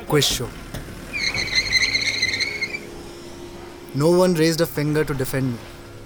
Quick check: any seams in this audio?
no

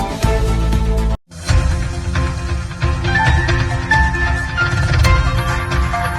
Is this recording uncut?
yes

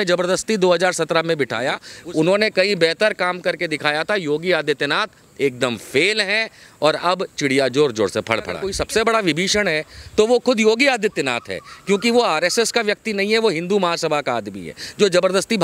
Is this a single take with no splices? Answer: no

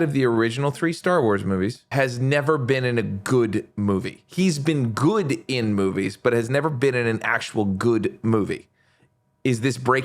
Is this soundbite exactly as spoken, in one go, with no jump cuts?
no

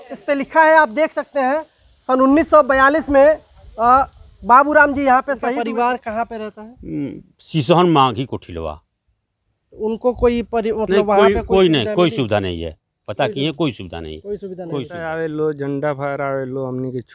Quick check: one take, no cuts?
no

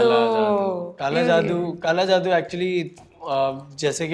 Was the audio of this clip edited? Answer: no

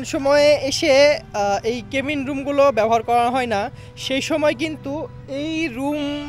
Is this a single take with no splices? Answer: yes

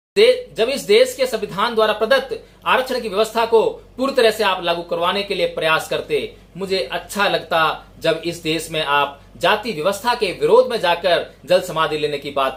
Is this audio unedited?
yes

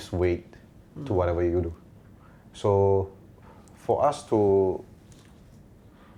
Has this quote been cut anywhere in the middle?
no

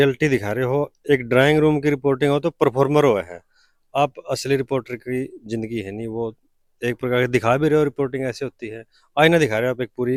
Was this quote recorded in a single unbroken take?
yes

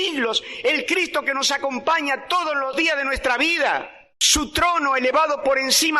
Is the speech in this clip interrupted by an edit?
yes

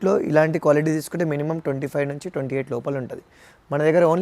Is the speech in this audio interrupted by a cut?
no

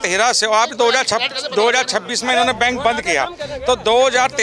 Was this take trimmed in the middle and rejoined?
no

